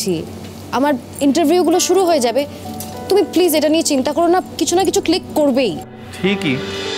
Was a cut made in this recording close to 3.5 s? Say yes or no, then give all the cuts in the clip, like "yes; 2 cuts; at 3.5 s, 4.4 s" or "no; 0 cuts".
no; 0 cuts